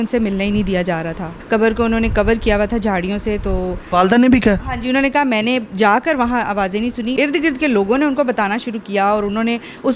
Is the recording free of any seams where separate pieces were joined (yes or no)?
no